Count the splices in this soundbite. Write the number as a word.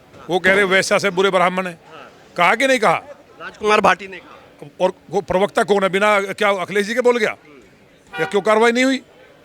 zero